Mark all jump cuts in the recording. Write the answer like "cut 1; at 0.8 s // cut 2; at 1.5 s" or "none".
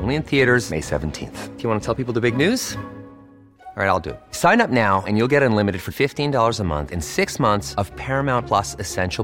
none